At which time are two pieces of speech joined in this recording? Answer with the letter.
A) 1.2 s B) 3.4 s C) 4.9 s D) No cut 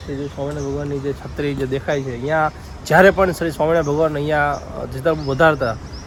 D